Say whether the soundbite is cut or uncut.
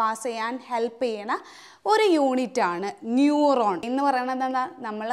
cut